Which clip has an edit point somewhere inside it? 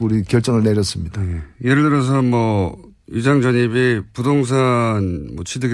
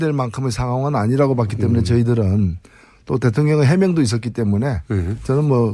second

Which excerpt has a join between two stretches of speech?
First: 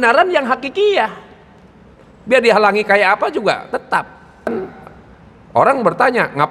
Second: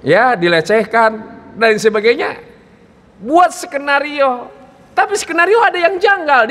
first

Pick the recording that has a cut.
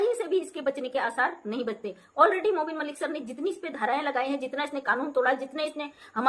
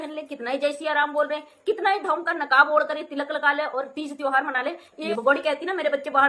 second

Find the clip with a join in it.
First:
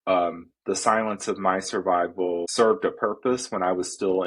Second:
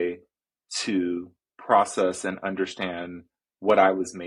first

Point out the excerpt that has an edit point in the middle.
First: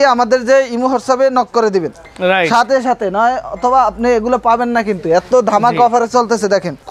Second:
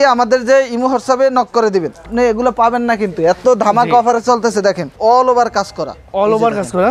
second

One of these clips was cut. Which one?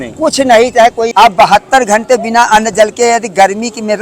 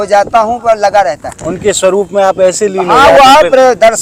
first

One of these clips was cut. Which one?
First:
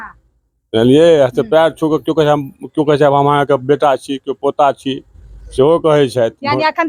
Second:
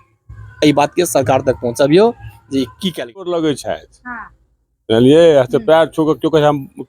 second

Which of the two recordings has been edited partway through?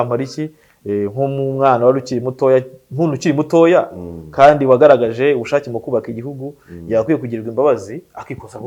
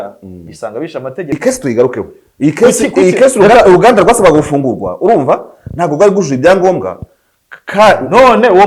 second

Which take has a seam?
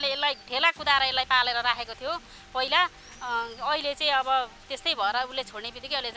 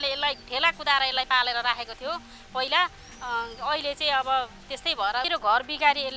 second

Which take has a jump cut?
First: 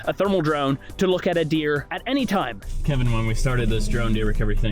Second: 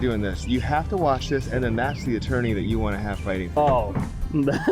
first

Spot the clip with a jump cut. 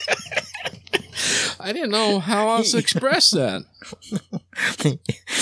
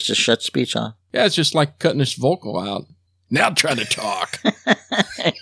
second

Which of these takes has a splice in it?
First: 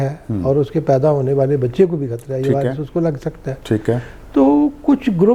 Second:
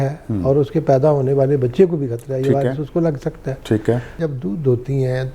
second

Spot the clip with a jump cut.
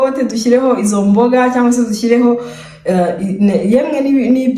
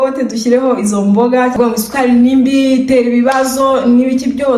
second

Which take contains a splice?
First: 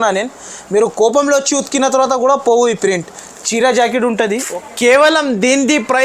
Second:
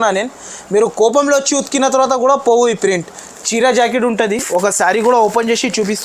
first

